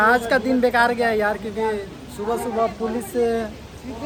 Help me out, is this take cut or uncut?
uncut